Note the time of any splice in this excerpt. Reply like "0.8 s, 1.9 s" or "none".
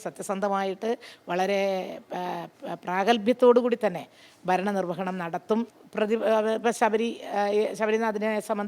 5.8 s